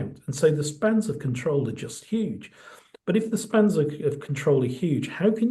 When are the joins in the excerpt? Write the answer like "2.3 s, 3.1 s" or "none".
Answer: none